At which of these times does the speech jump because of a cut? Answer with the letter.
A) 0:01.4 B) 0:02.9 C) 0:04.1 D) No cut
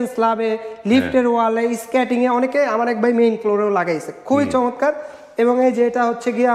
D